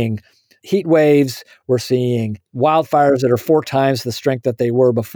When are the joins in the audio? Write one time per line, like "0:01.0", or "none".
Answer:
0:01.8